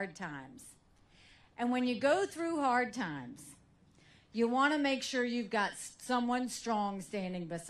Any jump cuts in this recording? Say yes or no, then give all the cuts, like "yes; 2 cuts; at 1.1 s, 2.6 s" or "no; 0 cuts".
yes; 1 cut; at 3.7 s